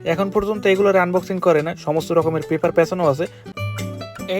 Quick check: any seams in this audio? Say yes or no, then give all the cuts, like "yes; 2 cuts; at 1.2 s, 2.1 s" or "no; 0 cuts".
yes; 1 cut; at 3.5 s